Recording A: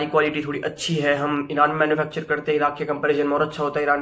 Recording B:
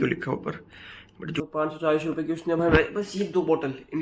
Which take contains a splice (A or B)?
B